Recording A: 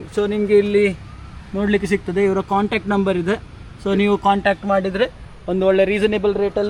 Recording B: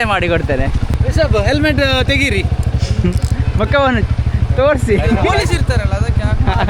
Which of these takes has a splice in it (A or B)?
B